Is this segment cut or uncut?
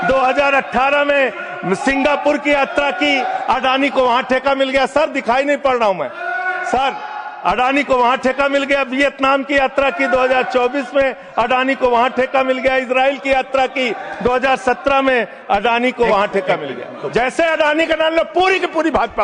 cut